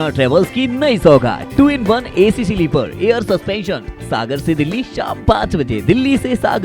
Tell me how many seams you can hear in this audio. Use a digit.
0